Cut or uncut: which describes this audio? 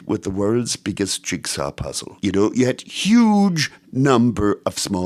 cut